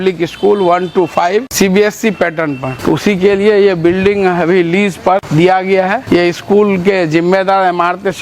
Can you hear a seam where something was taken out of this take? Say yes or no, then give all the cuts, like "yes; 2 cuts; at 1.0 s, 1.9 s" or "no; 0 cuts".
yes; 4 cuts; at 1.5 s, 2.7 s, 5.3 s, 6.0 s